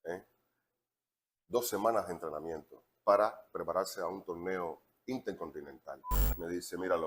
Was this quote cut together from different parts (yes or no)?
yes